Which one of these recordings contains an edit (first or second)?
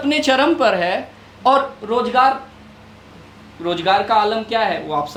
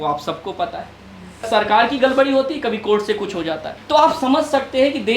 second